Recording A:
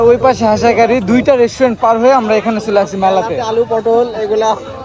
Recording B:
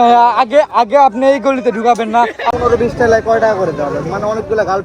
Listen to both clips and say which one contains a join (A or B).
B